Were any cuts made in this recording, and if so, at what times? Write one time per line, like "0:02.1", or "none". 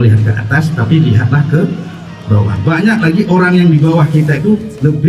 none